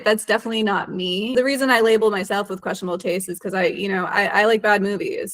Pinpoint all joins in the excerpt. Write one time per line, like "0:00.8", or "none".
0:01.4